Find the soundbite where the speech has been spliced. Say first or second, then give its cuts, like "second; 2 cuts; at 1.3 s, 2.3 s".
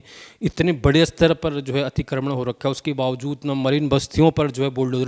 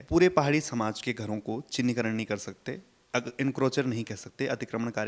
second; 1 cut; at 1.0 s